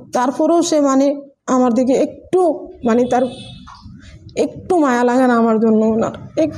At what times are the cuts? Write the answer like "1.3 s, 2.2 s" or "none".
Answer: none